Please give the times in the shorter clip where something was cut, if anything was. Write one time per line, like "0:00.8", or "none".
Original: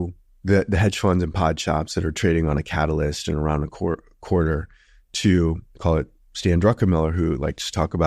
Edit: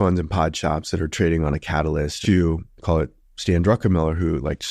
0:02.1